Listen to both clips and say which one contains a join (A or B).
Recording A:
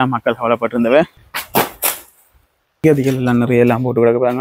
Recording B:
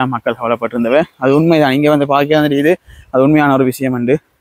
A